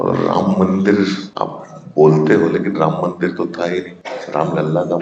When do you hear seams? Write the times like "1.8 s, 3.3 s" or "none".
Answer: 1.3 s, 4.0 s